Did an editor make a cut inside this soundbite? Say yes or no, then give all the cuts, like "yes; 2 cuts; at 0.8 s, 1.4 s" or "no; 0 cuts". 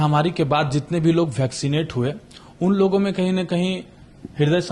no; 0 cuts